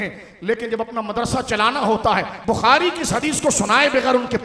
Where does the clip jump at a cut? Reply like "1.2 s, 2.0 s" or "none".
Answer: 2.3 s